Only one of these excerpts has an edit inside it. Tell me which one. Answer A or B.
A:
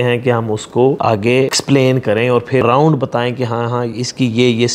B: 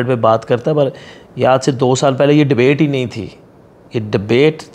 A